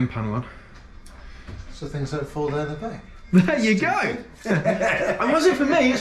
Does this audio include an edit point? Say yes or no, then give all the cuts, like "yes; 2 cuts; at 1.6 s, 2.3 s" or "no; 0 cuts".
no; 0 cuts